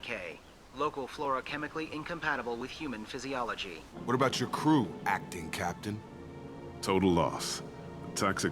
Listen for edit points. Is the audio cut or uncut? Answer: cut